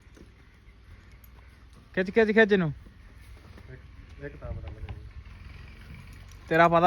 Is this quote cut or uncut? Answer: uncut